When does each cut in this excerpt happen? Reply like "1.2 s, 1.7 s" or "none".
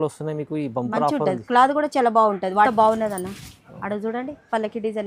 2.7 s